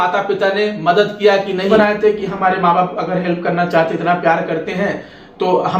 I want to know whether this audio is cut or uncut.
cut